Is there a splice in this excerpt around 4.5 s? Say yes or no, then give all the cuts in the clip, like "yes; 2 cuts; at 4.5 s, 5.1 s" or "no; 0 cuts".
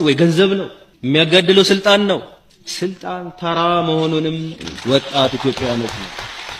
yes; 1 cut; at 4.5 s